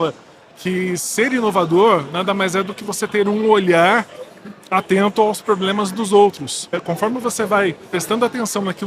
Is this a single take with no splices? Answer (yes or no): no